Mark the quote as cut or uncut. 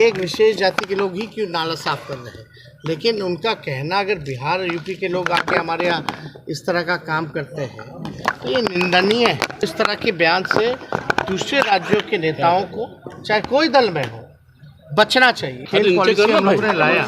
cut